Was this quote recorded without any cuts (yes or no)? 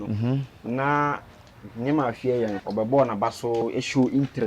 no